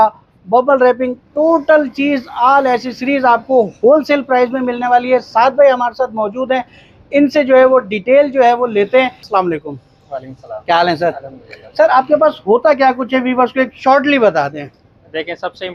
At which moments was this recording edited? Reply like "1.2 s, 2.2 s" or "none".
none

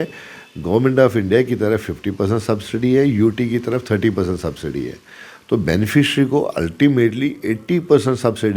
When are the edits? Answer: none

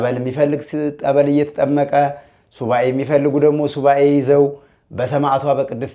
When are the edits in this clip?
none

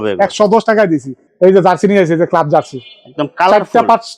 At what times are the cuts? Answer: 1.2 s

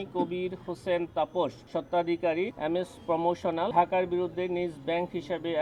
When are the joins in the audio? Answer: 1.6 s, 2.5 s, 3.7 s

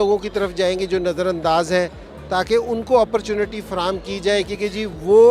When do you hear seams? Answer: none

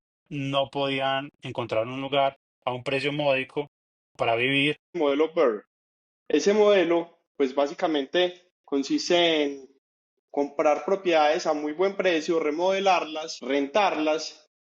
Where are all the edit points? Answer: 5.0 s, 13.3 s

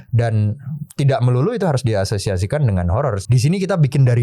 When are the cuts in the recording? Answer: 3.2 s

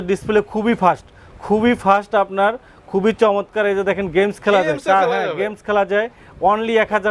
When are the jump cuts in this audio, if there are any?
none

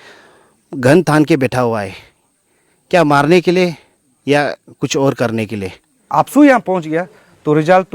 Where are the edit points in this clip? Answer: 6.1 s

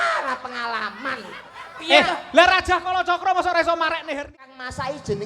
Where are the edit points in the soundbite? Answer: 4.3 s

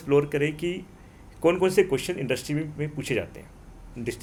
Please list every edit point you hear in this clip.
none

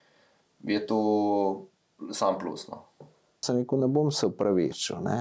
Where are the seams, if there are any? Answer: 3.4 s

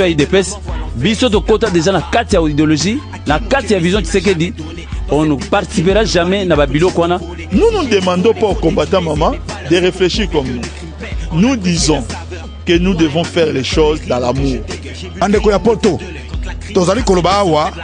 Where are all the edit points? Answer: none

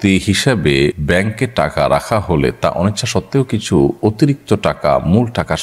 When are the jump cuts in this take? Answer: 1.0 s

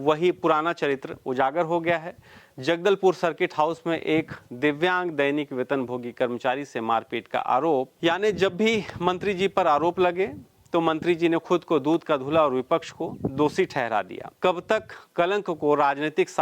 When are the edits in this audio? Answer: 7.9 s, 14.3 s

